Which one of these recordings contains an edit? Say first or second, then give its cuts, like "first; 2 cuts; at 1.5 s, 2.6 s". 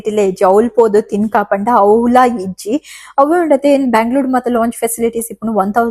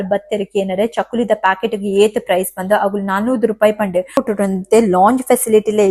second; 1 cut; at 4.2 s